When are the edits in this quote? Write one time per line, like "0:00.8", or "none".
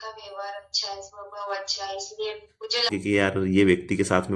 0:02.9